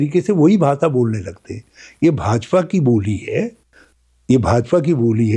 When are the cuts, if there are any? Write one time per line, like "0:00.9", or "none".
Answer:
none